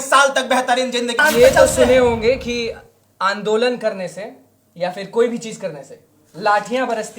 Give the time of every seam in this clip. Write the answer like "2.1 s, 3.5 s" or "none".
1.2 s